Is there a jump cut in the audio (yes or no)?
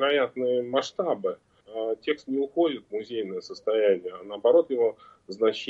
yes